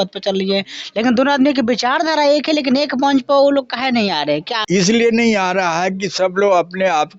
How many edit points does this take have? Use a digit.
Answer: 1